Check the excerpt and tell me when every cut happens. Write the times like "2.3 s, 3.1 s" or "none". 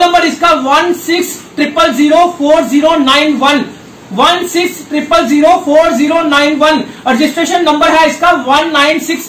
none